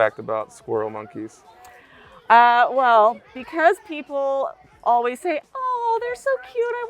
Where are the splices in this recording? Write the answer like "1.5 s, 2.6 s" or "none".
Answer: none